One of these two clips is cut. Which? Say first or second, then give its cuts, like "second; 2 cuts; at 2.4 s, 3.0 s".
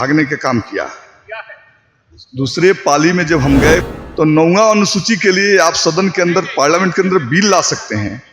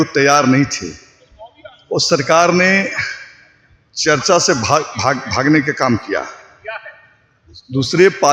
first; 1 cut; at 4.0 s